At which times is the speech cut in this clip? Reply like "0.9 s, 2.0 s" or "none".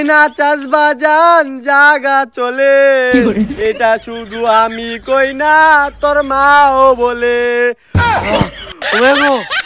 none